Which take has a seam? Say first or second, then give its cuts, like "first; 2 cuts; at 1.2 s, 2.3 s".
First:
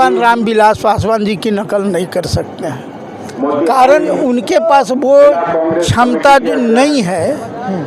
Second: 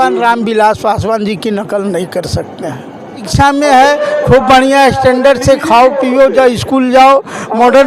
second; 1 cut; at 3.3 s